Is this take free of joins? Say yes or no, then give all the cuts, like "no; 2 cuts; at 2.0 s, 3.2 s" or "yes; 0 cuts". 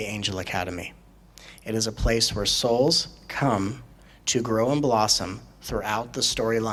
yes; 0 cuts